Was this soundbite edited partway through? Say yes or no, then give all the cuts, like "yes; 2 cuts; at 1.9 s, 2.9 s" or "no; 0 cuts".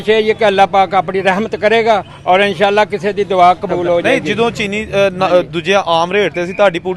yes; 1 cut; at 4.0 s